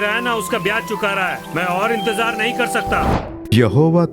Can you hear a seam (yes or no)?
yes